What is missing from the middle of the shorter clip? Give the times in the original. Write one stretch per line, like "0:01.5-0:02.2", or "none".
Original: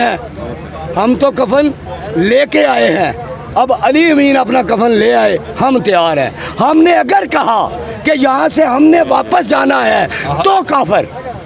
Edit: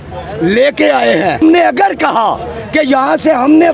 0:03.1-0:06.7